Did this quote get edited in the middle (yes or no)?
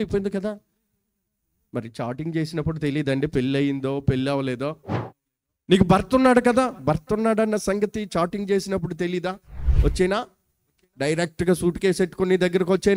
no